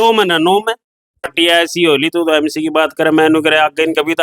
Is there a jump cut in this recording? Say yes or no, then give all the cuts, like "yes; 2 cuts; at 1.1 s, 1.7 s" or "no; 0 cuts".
yes; 1 cut; at 1.3 s